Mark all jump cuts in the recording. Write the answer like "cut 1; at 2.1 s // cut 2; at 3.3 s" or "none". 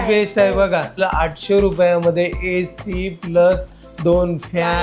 cut 1; at 0.9 s